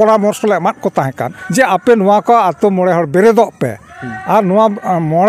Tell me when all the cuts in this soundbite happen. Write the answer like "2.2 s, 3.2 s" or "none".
1.4 s